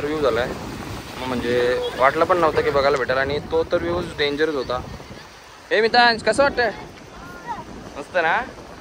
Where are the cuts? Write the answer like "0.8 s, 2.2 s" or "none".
none